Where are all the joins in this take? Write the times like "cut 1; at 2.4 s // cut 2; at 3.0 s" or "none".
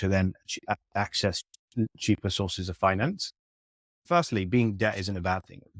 cut 1; at 4.0 s